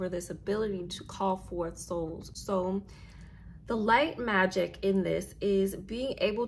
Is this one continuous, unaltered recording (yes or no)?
yes